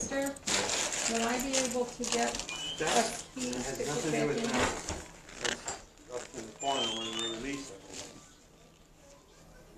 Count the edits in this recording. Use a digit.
0